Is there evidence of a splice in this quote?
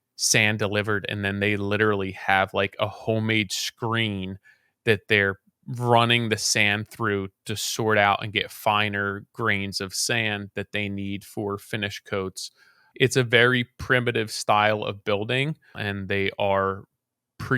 yes; 2 cuts; at 12.8 s, 15.8 s

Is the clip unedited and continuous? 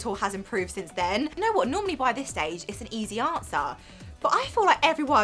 no; 1 cut; at 1.3 s

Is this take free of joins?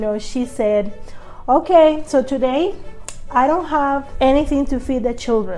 no; 1 cut; at 4.1 s

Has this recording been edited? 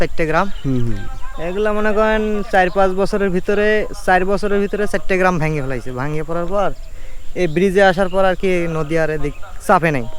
no; 0 cuts

